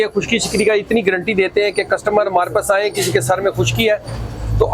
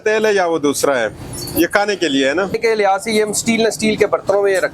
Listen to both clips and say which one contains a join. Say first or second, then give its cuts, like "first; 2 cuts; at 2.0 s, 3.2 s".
second; 1 cut; at 2.5 s